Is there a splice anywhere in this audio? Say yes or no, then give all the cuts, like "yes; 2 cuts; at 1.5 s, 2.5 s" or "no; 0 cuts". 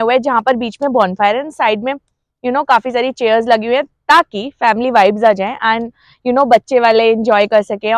no; 0 cuts